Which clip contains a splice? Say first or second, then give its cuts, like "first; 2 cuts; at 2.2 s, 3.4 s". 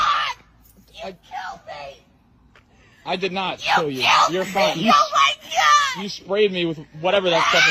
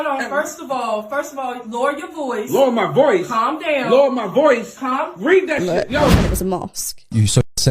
second; 1 cut; at 6.1 s